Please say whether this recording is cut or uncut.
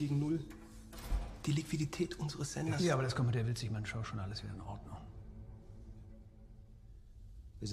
cut